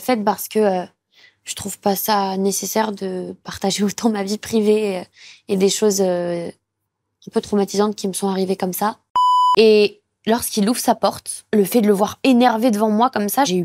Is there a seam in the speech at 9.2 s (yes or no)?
yes